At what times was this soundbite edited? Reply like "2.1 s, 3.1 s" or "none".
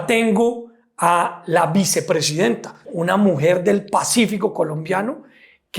2.7 s